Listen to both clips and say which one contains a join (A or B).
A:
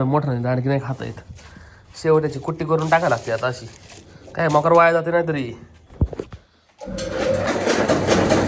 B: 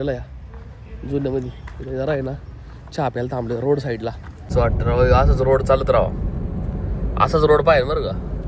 B